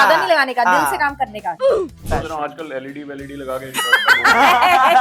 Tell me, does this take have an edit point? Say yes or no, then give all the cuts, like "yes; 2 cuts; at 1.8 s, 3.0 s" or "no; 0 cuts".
yes; 1 cut; at 1.8 s